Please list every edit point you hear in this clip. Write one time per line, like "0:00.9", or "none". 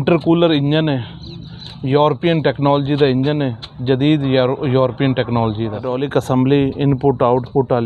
0:05.8